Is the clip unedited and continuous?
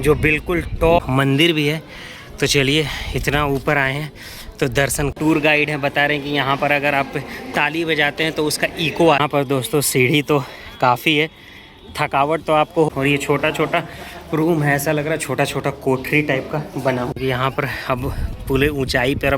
no; 5 cuts; at 1.0 s, 5.1 s, 9.2 s, 12.9 s, 17.2 s

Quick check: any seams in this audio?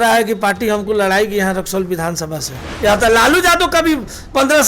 yes; 1 cut; at 2.6 s

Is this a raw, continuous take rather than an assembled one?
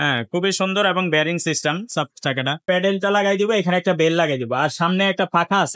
no; 1 cut; at 2.6 s

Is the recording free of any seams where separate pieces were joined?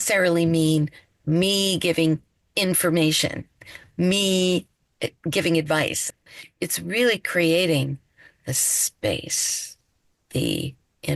no; 1 cut; at 6.0 s

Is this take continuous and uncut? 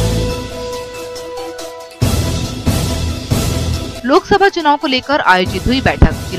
no; 1 cut; at 1.8 s

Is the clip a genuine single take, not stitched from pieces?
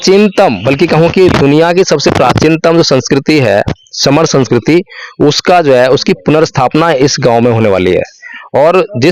yes; 0 cuts

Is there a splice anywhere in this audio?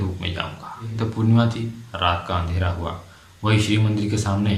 yes; 1 cut; at 0.9 s

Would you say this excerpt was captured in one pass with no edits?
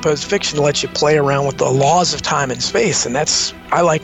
no; 1 cut; at 1.5 s

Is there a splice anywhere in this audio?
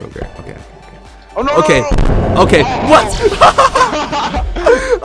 no; 0 cuts

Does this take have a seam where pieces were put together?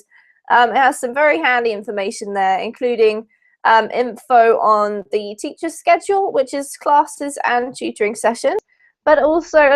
yes; 1 cut; at 1.8 s

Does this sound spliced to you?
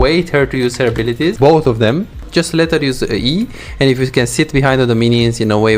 yes; 2 cuts; at 1.4 s, 2.2 s

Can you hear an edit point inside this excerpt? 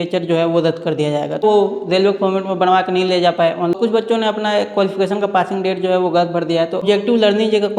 yes; 3 cuts; at 1.4 s, 3.7 s, 6.8 s

